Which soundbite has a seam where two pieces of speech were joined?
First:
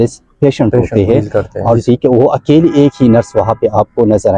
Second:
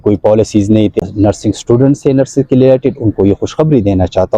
second; 1 cut; at 1.0 s

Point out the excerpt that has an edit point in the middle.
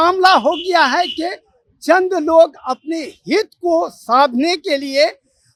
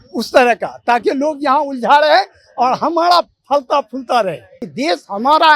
second; 1 cut; at 4.6 s

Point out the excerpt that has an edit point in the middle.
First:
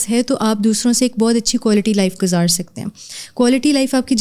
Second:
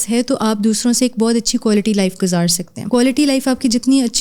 second; 1 cut; at 2.7 s

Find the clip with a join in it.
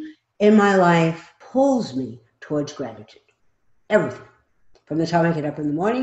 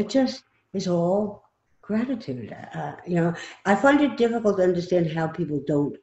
first; 1 cut; at 1.3 s

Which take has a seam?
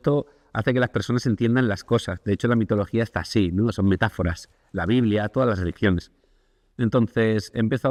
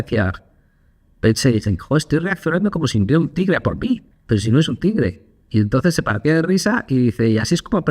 second; 1 cut; at 4.1 s

